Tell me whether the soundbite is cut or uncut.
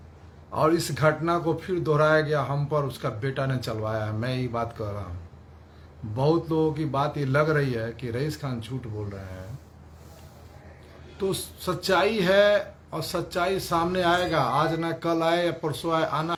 uncut